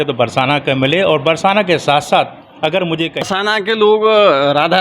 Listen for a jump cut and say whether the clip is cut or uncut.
cut